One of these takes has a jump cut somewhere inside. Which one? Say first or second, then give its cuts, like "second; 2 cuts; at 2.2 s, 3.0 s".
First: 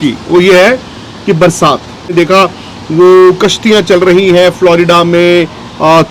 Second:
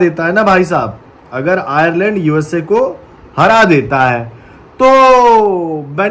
first; 1 cut; at 2.1 s